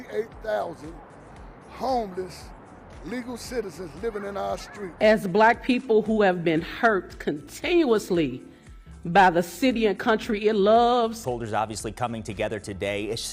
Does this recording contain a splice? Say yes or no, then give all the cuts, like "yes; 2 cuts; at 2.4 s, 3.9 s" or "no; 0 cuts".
no; 0 cuts